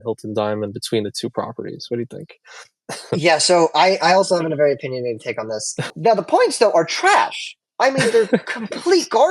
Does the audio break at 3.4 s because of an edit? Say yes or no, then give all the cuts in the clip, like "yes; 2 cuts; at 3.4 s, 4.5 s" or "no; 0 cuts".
no; 1 cut; at 5.9 s